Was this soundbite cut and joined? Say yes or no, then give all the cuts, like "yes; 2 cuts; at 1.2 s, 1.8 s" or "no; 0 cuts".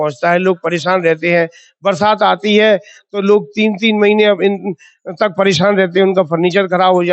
no; 0 cuts